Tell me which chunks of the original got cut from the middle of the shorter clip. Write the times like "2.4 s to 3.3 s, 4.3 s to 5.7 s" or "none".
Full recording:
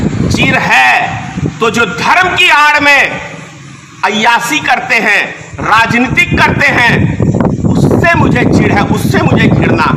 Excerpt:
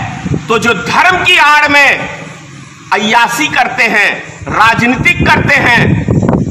none